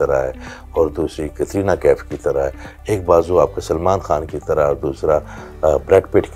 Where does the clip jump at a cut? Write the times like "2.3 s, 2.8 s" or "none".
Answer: none